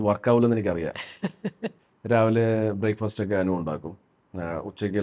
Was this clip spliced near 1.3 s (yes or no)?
yes